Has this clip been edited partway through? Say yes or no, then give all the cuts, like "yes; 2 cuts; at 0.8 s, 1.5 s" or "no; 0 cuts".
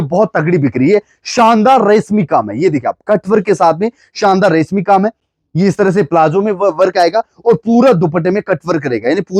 no; 0 cuts